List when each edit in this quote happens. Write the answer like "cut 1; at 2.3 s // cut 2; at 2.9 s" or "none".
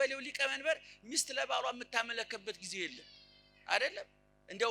none